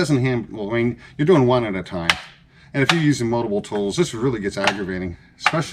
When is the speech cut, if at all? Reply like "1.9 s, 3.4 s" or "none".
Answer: none

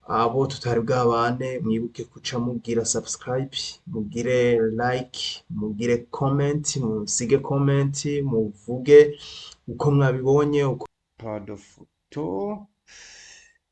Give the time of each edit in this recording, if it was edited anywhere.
10.8 s

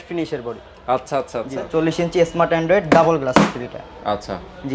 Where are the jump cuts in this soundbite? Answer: 1.7 s

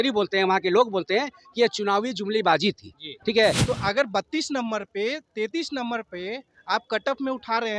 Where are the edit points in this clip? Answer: 3.6 s

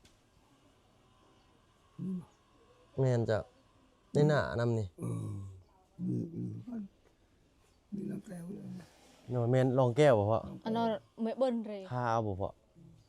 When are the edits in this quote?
11.8 s

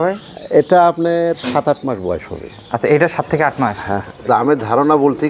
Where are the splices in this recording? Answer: 4.3 s

